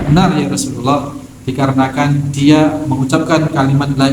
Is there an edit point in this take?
yes; 1 cut; at 2.9 s

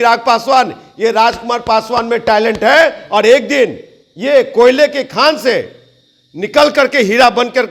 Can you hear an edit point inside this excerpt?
no; 0 cuts

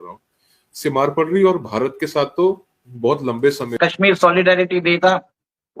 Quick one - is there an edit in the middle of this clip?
yes; 1 cut; at 3.8 s

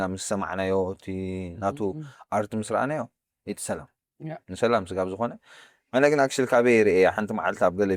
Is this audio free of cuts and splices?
yes; 0 cuts

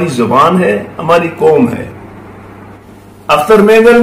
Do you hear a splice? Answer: yes; 1 cut; at 2.8 s

